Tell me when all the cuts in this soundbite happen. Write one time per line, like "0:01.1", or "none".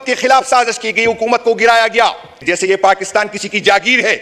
0:02.4